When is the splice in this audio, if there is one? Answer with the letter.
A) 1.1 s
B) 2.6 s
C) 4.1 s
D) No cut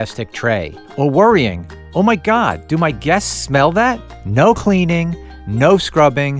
C